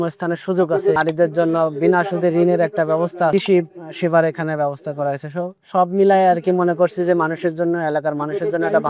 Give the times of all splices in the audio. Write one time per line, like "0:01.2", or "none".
0:01.0
0:03.3

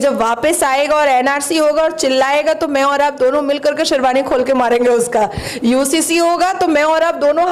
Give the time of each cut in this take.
none

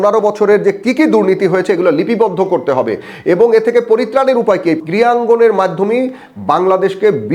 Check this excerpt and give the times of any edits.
0:04.8

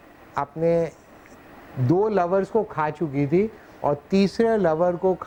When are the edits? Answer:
none

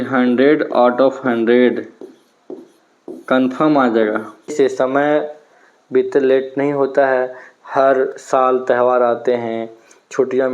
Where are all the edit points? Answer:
0:04.5

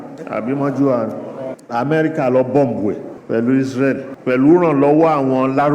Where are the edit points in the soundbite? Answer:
0:01.5
0:03.1
0:04.1

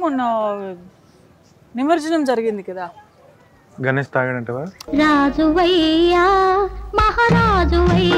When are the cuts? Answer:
none

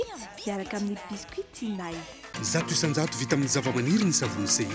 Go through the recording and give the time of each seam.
0:02.3

